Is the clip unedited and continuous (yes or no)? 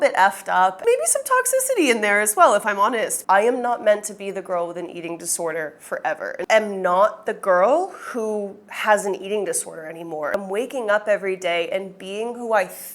no